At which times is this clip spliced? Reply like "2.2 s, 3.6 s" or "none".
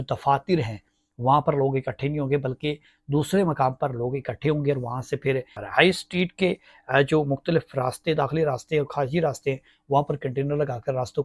5.6 s